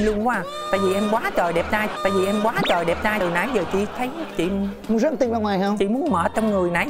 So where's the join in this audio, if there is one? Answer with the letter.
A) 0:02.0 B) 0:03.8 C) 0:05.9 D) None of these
D